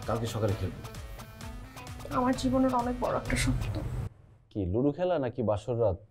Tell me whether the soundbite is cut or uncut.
uncut